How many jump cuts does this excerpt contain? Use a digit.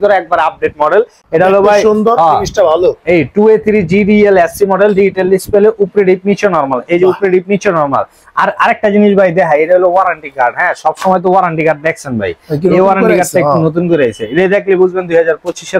0